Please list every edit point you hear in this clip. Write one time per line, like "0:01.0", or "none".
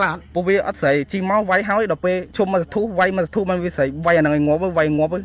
0:02.3